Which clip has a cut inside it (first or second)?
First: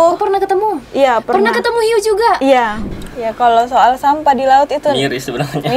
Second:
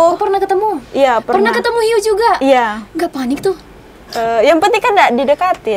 first